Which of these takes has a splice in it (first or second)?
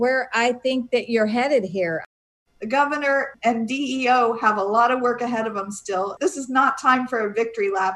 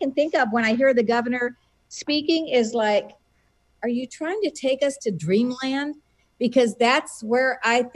first